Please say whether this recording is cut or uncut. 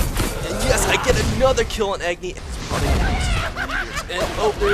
cut